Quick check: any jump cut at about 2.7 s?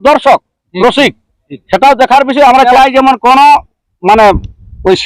yes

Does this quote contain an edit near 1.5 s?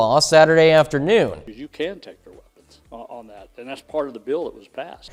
no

